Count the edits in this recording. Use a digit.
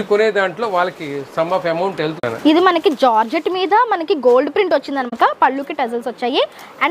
2